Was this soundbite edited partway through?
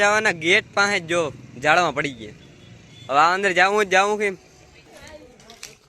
yes; 1 cut; at 4.9 s

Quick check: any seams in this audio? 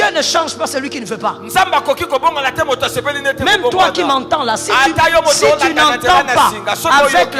no; 0 cuts

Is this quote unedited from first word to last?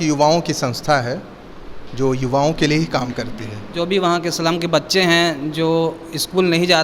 no; 1 cut; at 3.7 s

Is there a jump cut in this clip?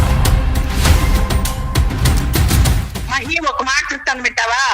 yes; 1 cut; at 2.5 s

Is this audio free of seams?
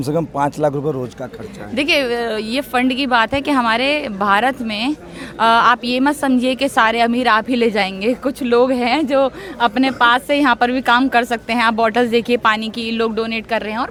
yes; 0 cuts

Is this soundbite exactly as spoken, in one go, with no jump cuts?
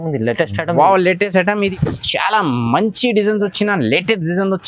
no; 1 cut; at 1.7 s

